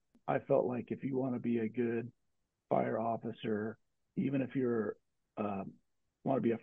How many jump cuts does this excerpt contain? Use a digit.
0